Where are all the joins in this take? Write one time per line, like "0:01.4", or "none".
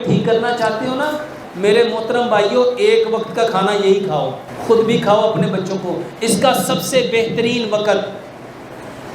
0:01.4
0:04.5